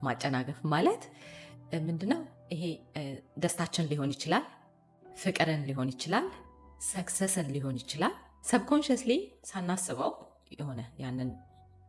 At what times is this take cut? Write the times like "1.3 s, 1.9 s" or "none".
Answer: none